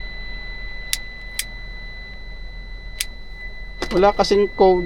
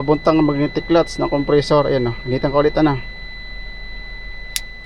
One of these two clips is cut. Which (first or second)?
first